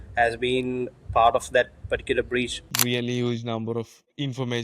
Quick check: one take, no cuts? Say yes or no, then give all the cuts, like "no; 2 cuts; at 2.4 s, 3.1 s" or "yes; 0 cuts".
no; 1 cut; at 2.6 s